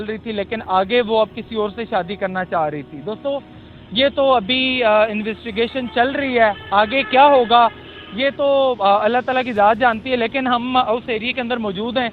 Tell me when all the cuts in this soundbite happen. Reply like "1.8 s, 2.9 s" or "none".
none

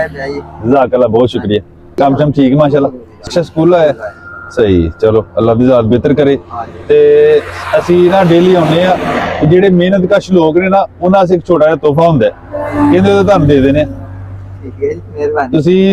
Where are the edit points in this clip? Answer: 1.8 s, 3.3 s

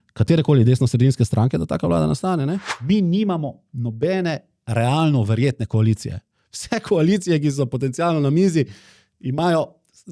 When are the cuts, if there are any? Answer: 2.7 s

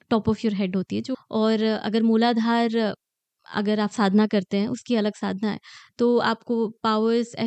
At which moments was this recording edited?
1.1 s

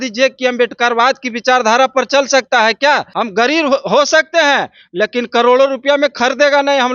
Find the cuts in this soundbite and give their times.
3.1 s

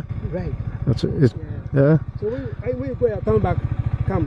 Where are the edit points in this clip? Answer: 1.4 s

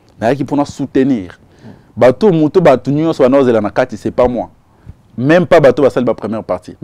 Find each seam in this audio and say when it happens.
none

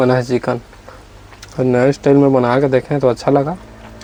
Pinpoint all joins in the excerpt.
none

